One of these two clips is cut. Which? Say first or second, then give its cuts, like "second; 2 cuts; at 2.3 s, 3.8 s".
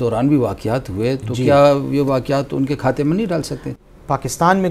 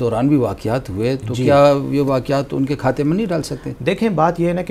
first; 1 cut; at 3.8 s